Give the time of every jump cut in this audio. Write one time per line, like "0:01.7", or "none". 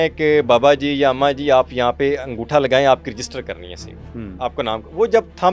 none

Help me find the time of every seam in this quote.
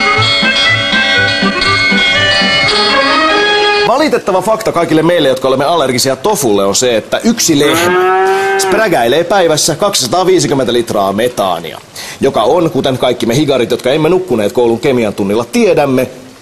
0:06.9

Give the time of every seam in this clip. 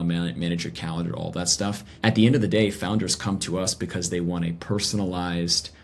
0:01.9

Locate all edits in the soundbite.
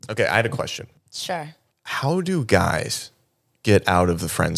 0:01.5

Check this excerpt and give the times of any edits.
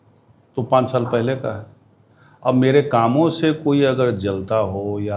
none

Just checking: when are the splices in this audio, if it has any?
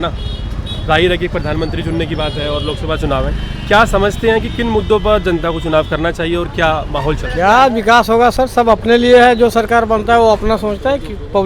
0:07.2

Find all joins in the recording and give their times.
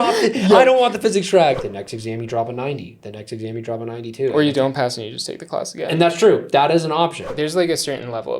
0:01.6
0:07.3

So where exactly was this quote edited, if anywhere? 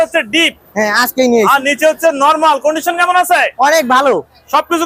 none

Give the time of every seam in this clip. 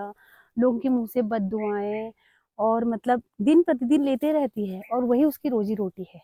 none

